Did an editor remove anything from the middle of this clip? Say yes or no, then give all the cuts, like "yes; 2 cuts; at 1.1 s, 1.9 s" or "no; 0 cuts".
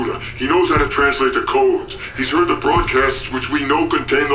yes; 1 cut; at 2.4 s